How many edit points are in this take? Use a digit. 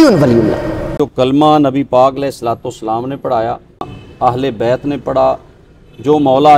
2